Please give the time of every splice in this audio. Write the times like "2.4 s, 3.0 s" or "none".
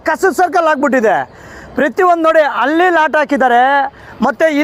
none